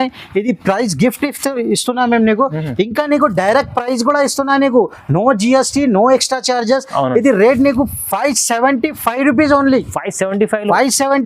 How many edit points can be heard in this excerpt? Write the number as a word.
zero